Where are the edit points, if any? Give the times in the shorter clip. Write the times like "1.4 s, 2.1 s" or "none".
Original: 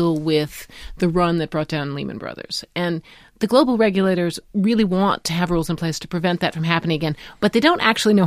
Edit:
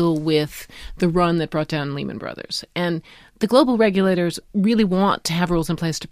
none